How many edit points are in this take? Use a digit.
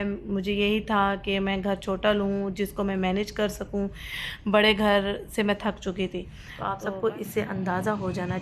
1